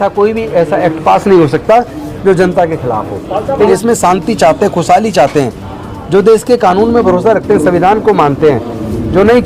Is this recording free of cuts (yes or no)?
no